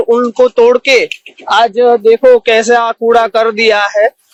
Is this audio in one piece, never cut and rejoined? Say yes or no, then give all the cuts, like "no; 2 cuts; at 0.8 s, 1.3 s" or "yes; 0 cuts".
yes; 0 cuts